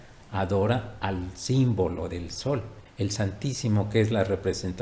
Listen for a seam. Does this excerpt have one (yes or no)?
yes